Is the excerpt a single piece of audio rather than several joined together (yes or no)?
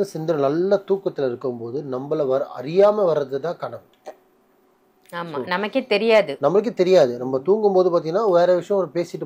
yes